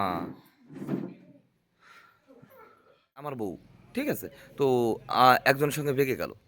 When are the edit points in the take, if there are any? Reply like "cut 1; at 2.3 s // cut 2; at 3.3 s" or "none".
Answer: cut 1; at 3.4 s